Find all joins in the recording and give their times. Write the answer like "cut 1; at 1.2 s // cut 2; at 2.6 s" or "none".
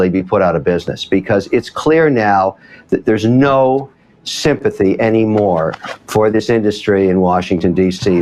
none